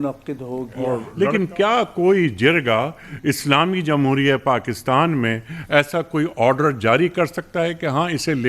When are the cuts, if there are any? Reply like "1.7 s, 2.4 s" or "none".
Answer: 1.1 s